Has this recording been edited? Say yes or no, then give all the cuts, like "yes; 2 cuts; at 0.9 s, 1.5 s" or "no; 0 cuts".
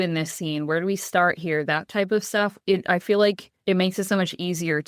yes; 2 cuts; at 2.6 s, 3.5 s